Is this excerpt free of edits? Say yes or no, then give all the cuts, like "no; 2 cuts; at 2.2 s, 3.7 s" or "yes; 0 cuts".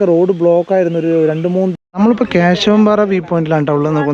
no; 1 cut; at 1.7 s